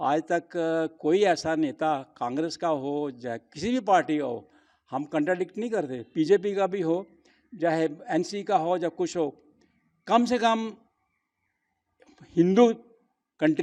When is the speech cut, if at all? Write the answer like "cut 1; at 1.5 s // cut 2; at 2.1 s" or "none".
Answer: none